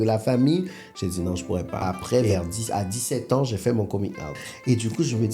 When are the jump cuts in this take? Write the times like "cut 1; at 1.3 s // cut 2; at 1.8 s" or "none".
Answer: cut 1; at 1.8 s // cut 2; at 4.5 s